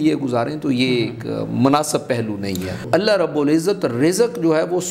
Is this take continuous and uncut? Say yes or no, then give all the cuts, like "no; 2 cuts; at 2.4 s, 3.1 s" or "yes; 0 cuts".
no; 1 cut; at 2.9 s